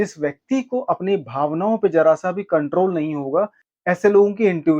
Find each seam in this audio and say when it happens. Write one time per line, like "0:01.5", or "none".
0:03.7